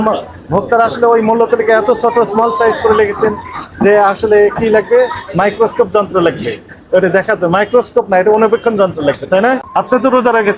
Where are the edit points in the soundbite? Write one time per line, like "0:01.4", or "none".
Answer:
0:09.7